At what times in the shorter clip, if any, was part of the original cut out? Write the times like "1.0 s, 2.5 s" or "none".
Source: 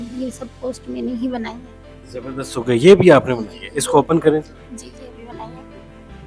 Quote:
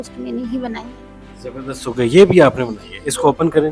none